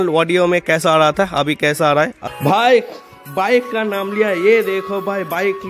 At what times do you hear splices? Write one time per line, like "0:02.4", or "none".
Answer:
0:02.2